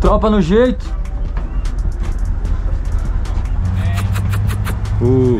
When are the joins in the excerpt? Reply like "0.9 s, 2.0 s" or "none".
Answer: 3.6 s